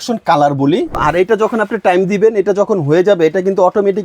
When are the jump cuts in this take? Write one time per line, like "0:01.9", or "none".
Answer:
0:01.0